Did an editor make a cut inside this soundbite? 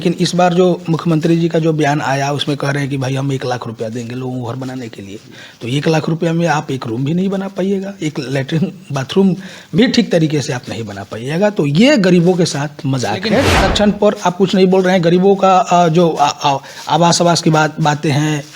yes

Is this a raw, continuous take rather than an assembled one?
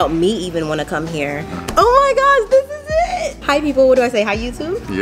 no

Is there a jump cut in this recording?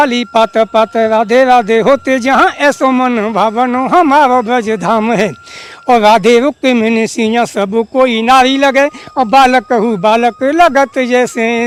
no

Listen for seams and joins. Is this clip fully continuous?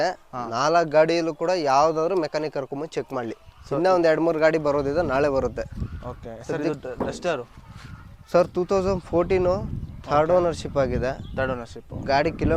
yes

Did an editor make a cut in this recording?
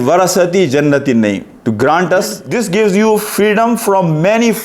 yes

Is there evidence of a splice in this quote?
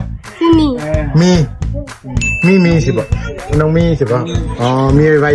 no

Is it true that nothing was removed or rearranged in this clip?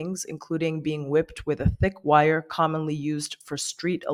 yes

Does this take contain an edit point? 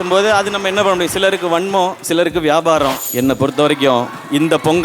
yes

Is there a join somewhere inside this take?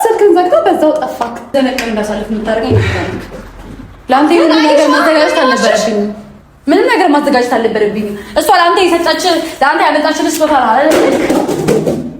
yes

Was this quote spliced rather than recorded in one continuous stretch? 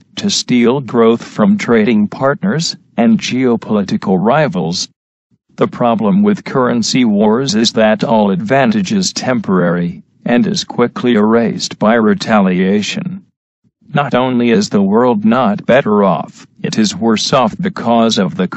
yes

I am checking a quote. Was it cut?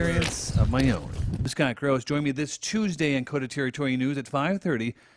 yes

